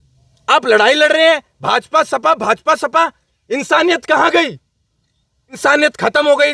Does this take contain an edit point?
yes; 1 cut; at 5.6 s

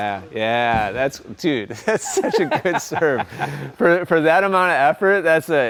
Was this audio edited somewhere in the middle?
no; 0 cuts

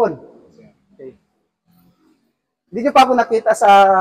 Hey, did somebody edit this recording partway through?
yes; 1 cut; at 1.2 s

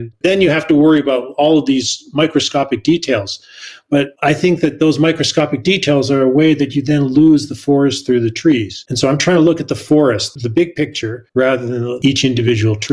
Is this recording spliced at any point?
yes; 1 cut; at 12.0 s

